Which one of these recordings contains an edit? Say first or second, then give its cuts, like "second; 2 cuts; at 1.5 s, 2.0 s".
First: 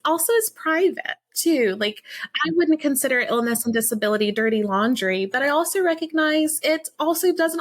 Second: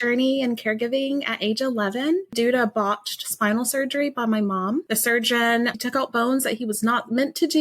second; 2 cuts; at 2.3 s, 5.8 s